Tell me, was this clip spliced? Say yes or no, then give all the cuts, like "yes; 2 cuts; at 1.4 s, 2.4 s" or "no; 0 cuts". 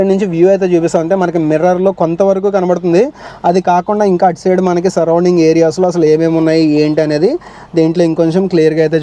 no; 0 cuts